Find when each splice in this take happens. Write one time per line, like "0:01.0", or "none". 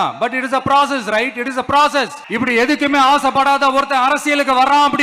0:02.2